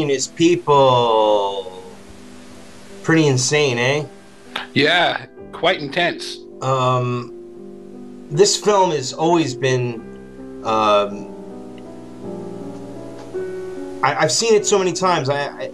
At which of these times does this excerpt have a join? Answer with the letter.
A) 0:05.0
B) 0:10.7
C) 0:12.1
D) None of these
A